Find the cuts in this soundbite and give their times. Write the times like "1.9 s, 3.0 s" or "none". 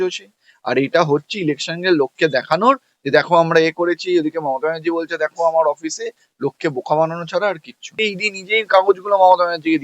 8.0 s